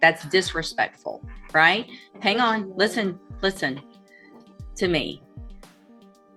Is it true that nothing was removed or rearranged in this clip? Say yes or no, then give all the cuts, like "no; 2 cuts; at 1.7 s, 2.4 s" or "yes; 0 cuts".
yes; 0 cuts